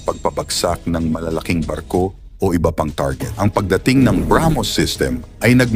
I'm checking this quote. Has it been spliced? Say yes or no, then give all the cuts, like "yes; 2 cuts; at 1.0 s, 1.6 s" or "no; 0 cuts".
yes; 1 cut; at 3.2 s